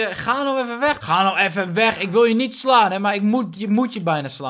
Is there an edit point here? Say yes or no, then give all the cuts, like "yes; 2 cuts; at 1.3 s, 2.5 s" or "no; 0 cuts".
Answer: yes; 1 cut; at 1.0 s